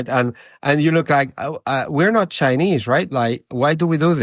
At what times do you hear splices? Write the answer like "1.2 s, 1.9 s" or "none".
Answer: none